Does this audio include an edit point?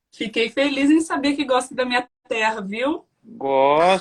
no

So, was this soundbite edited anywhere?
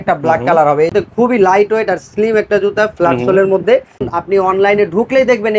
yes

